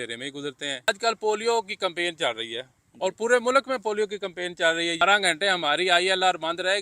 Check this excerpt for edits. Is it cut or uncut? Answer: cut